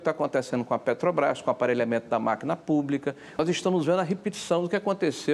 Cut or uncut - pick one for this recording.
cut